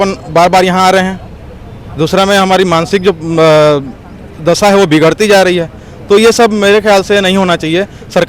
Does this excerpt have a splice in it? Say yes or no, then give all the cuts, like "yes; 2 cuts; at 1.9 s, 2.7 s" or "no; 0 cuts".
no; 0 cuts